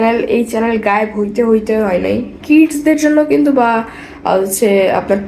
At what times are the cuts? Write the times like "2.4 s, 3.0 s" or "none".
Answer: 2.3 s